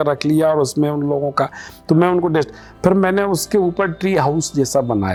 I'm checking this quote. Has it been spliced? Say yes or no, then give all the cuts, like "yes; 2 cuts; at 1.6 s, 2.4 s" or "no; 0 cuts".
no; 0 cuts